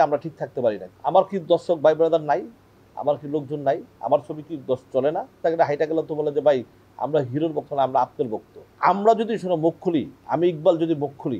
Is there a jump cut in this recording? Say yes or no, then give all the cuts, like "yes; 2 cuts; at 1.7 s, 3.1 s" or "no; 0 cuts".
yes; 4 cuts; at 0.9 s, 5.4 s, 8.6 s, 10.2 s